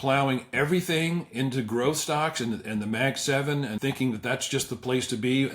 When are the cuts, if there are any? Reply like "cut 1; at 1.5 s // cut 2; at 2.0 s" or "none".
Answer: cut 1; at 3.8 s